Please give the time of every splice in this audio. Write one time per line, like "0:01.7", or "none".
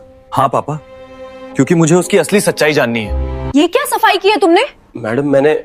0:03.2